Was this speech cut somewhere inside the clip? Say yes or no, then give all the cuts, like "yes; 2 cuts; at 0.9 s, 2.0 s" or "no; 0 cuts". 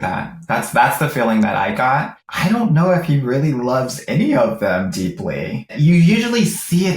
yes; 2 cuts; at 2.2 s, 5.7 s